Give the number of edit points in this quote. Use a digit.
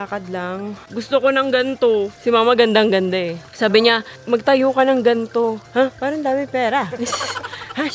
3